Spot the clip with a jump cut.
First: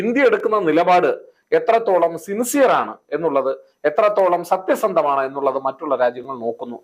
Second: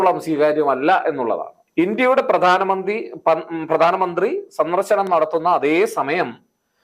second; 1 cut; at 1.5 s

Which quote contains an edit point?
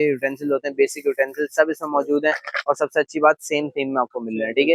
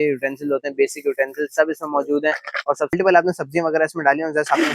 second; 1 cut; at 2.9 s

